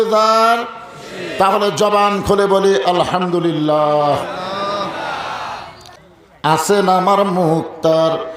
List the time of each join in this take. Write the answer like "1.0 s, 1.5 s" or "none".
6.6 s